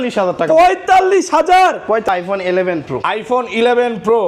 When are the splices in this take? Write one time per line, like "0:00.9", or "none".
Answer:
0:02.1